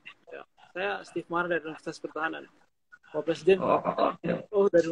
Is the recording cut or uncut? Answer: uncut